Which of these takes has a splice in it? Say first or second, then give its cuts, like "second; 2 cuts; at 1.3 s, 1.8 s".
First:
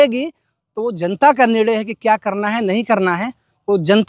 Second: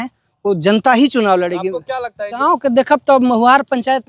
second; 1 cut; at 2.4 s